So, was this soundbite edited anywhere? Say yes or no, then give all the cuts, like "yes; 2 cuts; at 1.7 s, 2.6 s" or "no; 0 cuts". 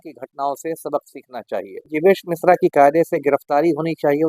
yes; 1 cut; at 1.9 s